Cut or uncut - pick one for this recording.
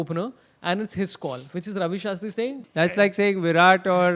cut